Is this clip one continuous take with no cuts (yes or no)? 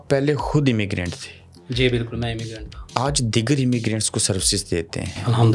yes